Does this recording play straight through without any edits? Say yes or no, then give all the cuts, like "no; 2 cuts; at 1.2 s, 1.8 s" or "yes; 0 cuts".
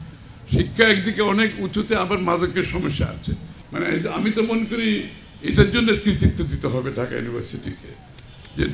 no; 1 cut; at 3.5 s